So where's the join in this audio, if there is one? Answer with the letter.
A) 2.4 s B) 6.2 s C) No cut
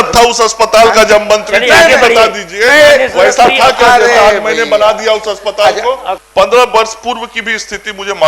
B